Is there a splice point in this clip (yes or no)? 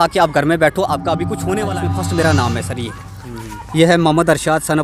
yes